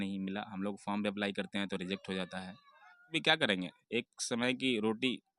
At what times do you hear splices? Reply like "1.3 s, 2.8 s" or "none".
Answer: 3.1 s